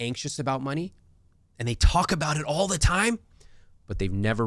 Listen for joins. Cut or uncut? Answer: uncut